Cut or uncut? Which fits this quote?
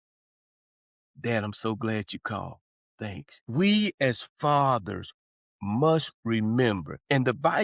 cut